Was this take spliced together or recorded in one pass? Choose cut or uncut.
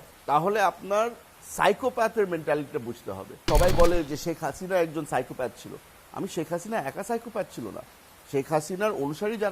cut